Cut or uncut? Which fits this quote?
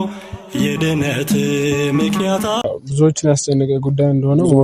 cut